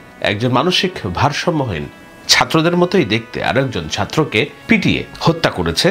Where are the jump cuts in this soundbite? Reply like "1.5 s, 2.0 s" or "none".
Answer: 4.8 s